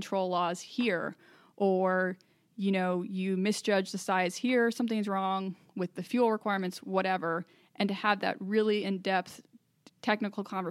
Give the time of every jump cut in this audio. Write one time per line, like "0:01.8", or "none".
none